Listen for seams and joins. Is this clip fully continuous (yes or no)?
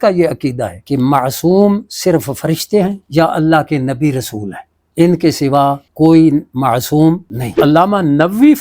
no